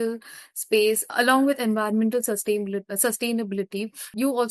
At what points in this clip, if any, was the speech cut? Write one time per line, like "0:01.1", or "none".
none